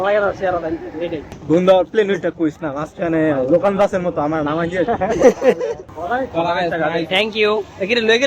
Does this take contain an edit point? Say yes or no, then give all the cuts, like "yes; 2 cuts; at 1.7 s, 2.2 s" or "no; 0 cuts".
yes; 2 cuts; at 1.3 s, 5.9 s